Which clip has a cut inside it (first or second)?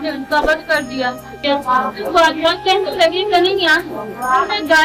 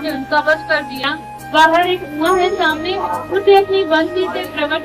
second